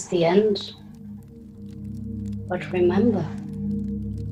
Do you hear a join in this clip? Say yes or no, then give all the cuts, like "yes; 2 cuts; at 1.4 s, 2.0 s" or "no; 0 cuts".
yes; 1 cut; at 3.3 s